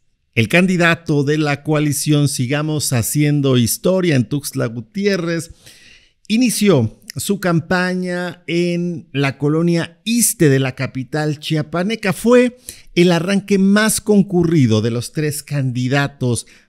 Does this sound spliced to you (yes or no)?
no